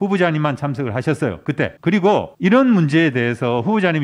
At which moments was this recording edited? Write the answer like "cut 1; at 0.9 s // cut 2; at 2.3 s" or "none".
cut 1; at 2.3 s